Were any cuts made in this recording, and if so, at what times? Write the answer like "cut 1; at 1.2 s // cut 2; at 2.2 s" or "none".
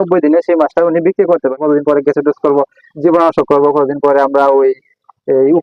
cut 1; at 1.5 s